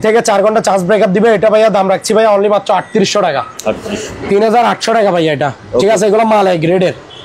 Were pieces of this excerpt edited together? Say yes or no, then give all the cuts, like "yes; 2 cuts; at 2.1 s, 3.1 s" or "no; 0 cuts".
no; 0 cuts